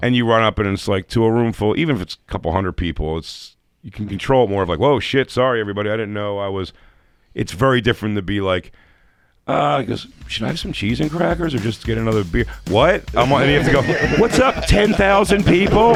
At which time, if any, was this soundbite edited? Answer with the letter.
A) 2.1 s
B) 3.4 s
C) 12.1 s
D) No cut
D